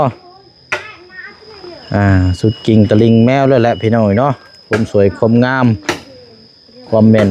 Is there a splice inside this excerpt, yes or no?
no